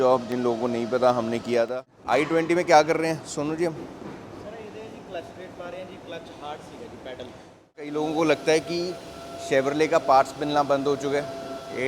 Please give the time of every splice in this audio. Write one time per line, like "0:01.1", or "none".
0:01.9
0:07.9